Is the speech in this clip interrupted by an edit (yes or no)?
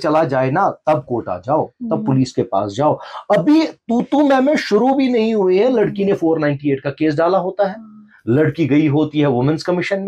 no